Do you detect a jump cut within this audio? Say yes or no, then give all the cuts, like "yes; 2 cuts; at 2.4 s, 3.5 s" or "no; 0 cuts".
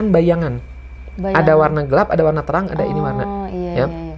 no; 0 cuts